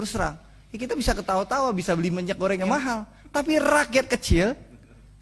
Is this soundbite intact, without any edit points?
no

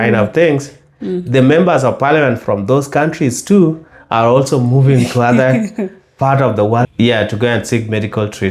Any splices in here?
yes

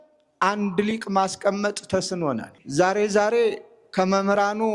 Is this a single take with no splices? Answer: no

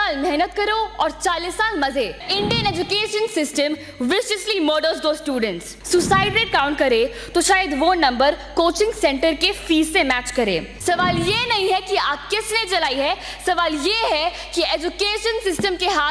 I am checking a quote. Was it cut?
yes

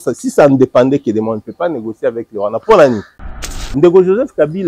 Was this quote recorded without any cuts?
no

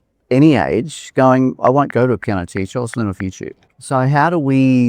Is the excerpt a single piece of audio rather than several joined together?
no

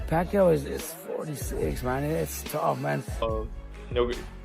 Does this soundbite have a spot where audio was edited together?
yes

